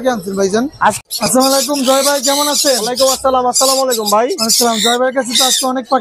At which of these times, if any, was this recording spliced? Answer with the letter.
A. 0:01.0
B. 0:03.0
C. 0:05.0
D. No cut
A